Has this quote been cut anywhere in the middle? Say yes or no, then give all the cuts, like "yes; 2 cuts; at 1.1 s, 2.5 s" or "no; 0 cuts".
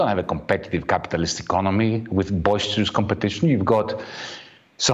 no; 0 cuts